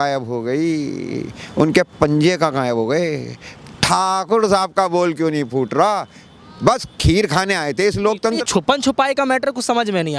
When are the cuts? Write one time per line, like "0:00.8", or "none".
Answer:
0:08.2